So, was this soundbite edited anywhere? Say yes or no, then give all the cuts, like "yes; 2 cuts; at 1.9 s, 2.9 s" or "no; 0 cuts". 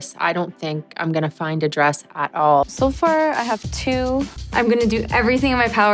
yes; 1 cut; at 2.7 s